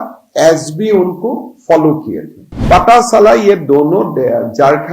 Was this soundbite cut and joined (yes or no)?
yes